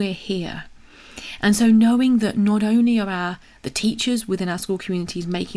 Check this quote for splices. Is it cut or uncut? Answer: uncut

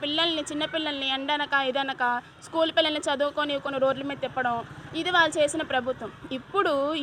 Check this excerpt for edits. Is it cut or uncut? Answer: uncut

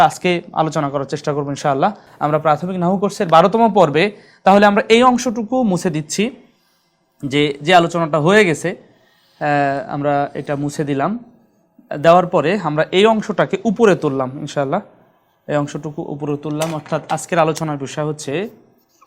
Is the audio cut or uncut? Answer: uncut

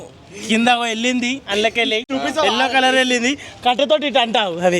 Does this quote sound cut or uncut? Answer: cut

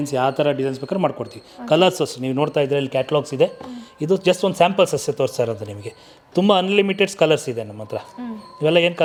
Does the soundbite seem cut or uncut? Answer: uncut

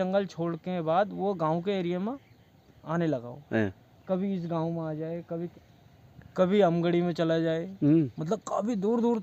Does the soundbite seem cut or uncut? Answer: uncut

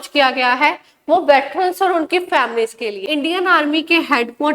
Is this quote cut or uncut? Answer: cut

